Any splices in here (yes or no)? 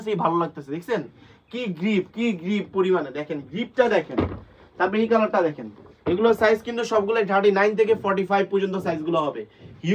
no